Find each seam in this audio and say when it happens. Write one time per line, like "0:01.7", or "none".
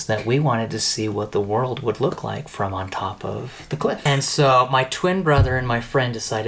0:04.0